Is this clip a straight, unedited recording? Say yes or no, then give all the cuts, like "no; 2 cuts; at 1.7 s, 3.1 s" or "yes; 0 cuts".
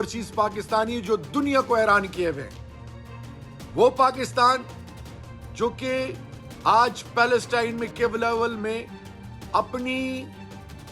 yes; 0 cuts